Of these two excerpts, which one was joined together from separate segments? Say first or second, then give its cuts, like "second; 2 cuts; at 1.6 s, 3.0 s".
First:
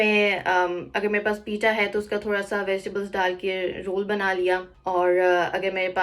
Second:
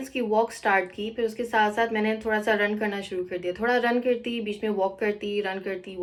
first; 1 cut; at 4.7 s